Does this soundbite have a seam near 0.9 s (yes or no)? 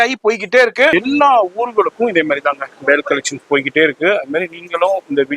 yes